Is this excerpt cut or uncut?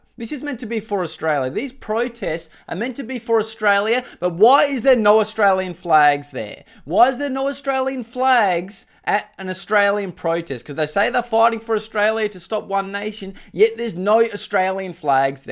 uncut